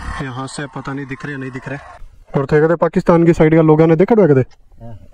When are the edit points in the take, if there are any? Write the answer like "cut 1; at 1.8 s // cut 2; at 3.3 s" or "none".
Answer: cut 1; at 1.9 s